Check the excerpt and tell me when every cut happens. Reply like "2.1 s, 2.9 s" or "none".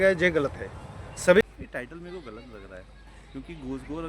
1.4 s